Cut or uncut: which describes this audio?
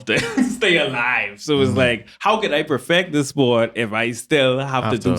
uncut